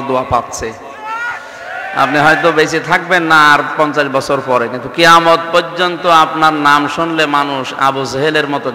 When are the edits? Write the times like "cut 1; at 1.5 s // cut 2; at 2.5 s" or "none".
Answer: none